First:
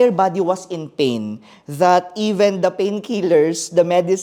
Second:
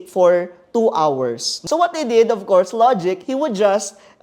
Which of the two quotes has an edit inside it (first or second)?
second